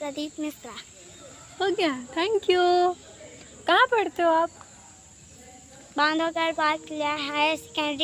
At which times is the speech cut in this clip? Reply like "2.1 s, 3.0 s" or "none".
none